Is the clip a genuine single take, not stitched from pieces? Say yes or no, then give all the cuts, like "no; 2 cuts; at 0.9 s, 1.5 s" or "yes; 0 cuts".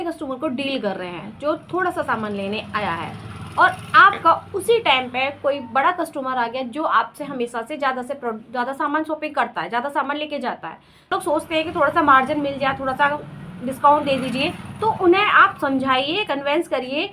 no; 1 cut; at 11.1 s